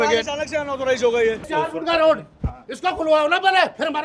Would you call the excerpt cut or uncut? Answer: cut